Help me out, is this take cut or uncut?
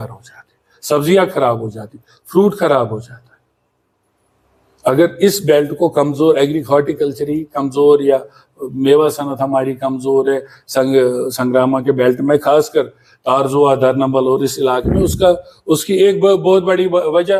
uncut